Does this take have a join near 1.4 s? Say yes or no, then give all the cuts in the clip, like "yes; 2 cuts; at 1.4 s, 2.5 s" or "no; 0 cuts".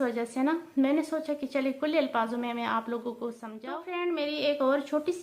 no; 1 cut; at 3.9 s